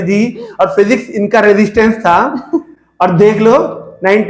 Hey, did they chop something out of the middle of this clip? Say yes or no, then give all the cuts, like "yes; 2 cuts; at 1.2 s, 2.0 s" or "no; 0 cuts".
no; 0 cuts